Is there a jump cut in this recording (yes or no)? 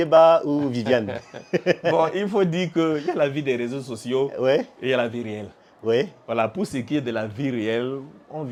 no